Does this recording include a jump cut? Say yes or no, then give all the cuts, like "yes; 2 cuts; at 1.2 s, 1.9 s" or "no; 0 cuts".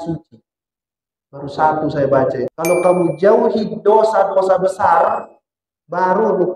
yes; 1 cut; at 2.5 s